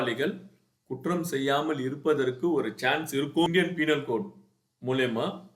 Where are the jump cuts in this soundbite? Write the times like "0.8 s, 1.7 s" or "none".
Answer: 3.5 s